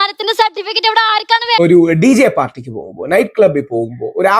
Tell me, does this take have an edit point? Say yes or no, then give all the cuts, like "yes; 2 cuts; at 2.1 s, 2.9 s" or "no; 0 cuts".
yes; 1 cut; at 1.6 s